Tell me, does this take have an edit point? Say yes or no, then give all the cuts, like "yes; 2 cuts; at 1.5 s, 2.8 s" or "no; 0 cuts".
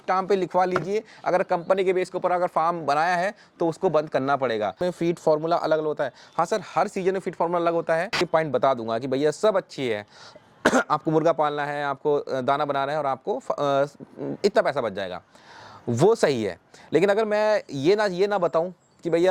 yes; 2 cuts; at 4.8 s, 8.2 s